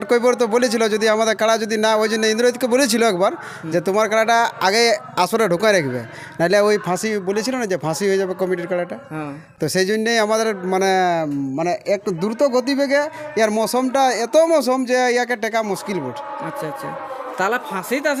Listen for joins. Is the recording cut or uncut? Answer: uncut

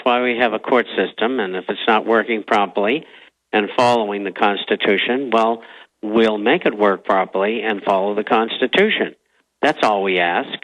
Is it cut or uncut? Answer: uncut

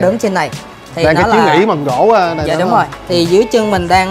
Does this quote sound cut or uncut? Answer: cut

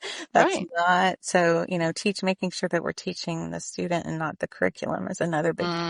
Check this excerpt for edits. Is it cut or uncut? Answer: uncut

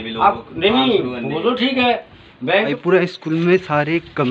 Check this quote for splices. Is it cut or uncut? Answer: cut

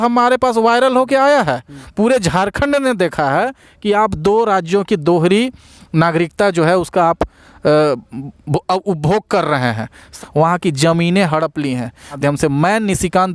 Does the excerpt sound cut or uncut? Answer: cut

